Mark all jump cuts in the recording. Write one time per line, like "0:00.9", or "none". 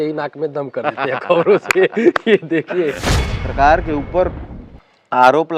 0:03.0